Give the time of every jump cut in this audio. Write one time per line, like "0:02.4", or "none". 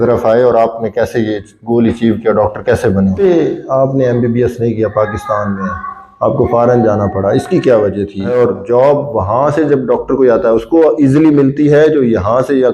0:03.2
0:08.3

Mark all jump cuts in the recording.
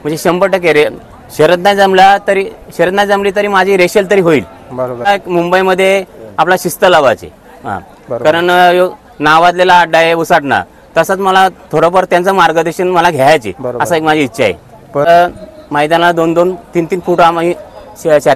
0:05.1
0:15.1

